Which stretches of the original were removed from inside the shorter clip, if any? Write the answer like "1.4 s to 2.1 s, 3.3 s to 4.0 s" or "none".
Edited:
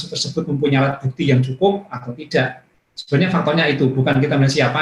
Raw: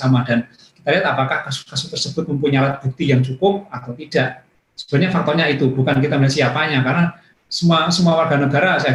none